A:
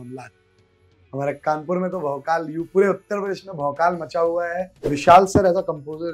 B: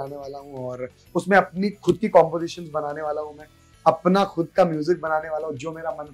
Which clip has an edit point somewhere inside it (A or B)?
A